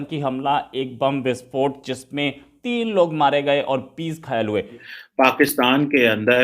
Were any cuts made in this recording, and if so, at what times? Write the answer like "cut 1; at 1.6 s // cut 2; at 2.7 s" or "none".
cut 1; at 4.9 s

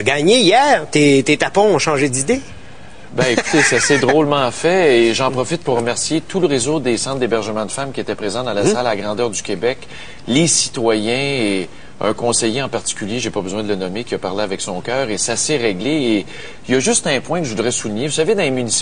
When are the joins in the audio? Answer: cut 1; at 16.4 s

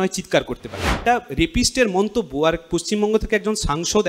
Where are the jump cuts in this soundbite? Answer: cut 1; at 0.9 s

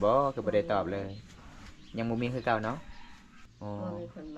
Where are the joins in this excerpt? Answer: cut 1; at 3.3 s

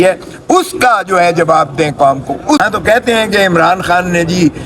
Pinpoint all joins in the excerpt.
cut 1; at 2.6 s

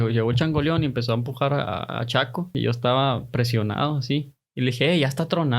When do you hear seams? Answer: cut 1; at 2.5 s

